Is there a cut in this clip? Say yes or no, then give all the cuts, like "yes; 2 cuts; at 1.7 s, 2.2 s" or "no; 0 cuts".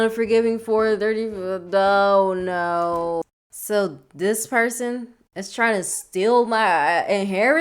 yes; 1 cut; at 3.2 s